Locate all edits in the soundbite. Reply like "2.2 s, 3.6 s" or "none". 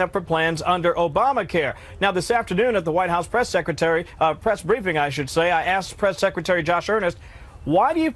1.7 s